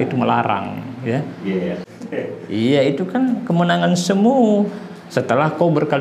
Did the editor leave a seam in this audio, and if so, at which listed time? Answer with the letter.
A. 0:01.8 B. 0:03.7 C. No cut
A